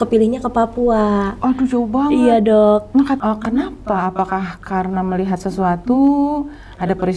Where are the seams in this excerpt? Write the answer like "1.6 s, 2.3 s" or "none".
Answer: 3.2 s